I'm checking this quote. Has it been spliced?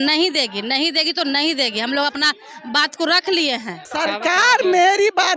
yes; 1 cut; at 3.8 s

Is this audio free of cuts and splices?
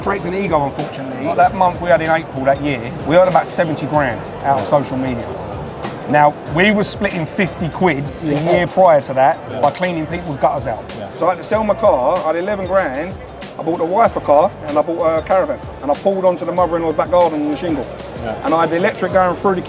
no; 5 cuts; at 1.3 s, 2.9 s, 11.0 s, 14.6 s, 15.7 s

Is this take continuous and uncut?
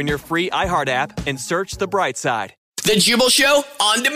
no; 1 cut; at 2.7 s

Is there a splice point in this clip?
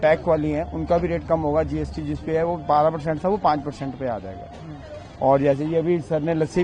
no; 0 cuts

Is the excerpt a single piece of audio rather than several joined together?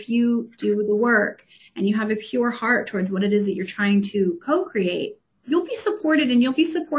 yes; 0 cuts

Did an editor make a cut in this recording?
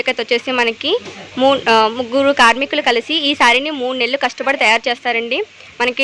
no; 0 cuts

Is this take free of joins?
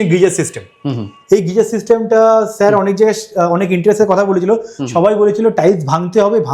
yes; 0 cuts

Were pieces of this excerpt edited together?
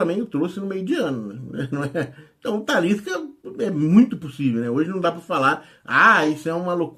no; 0 cuts

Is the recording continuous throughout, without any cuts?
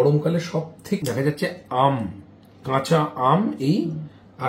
no; 1 cut; at 1.0 s

